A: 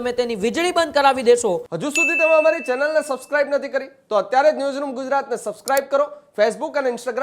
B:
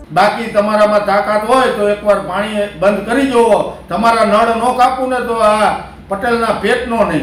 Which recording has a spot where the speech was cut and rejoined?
A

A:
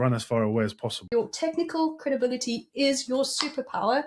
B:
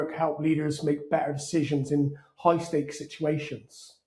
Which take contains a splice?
A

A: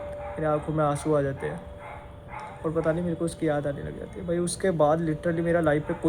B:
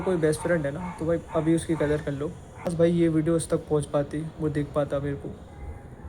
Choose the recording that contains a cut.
B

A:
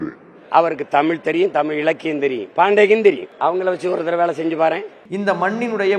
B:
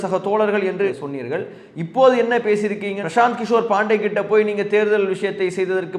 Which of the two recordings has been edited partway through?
A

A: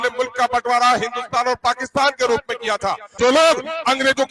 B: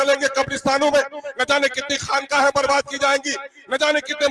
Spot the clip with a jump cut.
A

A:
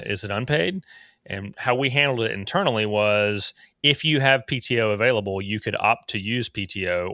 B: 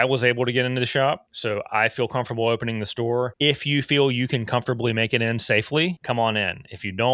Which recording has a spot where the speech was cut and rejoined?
B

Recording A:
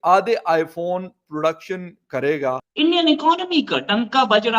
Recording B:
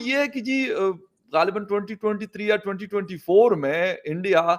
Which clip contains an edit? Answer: A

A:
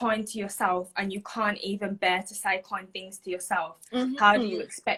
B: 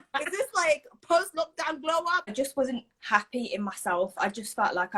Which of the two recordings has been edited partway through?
B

